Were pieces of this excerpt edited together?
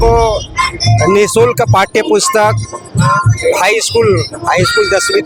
no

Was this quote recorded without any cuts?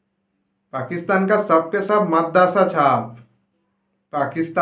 yes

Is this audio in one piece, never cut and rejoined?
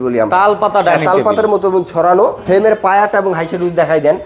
no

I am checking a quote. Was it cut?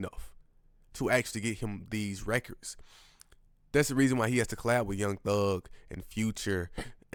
no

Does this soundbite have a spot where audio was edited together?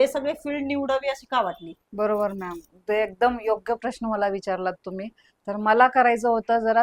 no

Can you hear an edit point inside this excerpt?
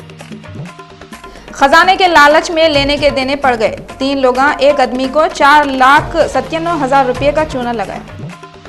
no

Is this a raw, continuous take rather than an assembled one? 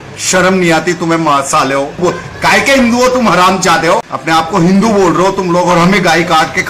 no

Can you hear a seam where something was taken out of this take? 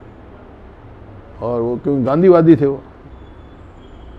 yes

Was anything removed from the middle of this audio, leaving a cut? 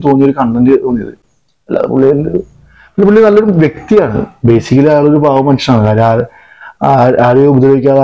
no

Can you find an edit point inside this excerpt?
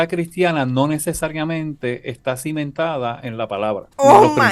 no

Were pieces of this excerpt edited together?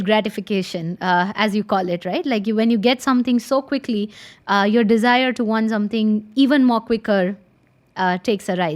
no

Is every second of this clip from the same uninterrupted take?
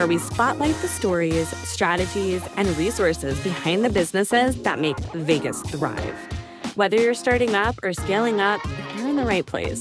yes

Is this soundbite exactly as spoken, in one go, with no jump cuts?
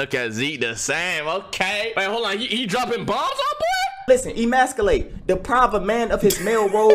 no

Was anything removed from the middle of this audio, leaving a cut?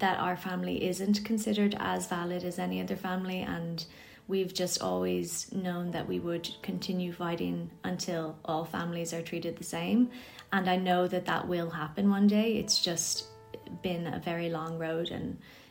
no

